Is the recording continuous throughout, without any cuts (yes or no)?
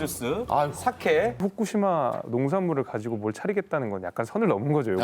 no